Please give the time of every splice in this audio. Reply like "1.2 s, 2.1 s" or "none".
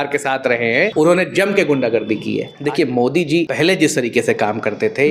0.9 s, 2.5 s, 3.5 s